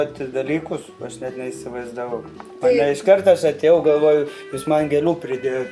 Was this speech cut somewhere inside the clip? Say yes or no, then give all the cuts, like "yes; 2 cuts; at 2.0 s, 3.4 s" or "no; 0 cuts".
no; 0 cuts